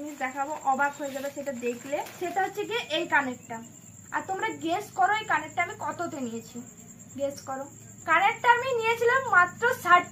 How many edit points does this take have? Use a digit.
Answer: 0